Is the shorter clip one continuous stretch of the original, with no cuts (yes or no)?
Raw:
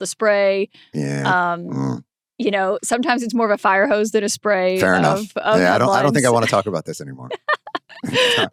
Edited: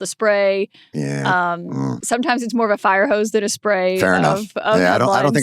no